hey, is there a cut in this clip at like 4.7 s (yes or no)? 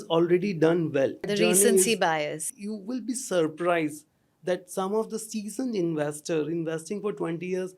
no